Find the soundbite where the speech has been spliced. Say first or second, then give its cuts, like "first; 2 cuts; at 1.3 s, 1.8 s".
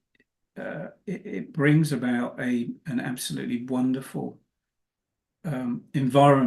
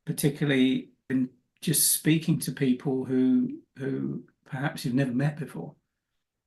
second; 1 cut; at 1.1 s